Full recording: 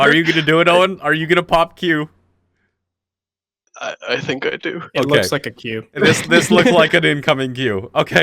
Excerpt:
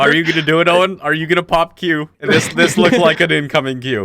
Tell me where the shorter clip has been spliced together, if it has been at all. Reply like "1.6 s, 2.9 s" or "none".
2.1 s